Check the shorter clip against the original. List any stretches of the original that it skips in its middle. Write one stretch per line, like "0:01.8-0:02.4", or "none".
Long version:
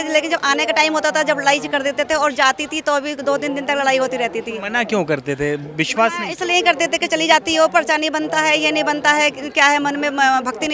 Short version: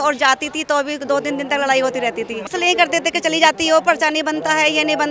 0:04.6-0:06.3